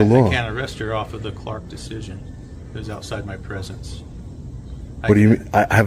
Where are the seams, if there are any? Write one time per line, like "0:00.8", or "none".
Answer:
none